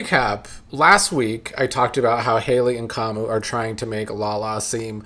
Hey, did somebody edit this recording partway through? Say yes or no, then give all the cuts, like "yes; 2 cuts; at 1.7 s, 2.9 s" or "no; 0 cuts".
no; 0 cuts